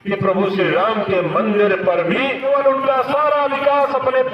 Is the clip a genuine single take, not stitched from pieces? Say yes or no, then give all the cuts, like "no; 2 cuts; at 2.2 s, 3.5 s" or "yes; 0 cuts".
no; 1 cut; at 2.4 s